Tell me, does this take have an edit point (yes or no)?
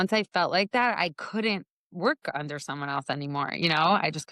no